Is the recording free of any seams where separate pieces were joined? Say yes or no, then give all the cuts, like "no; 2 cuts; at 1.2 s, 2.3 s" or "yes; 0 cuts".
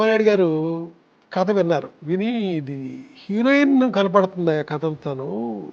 no; 1 cut; at 1.9 s